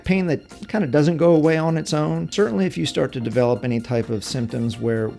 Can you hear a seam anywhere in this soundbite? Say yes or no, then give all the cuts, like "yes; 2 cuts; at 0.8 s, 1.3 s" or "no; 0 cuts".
yes; 1 cut; at 2.3 s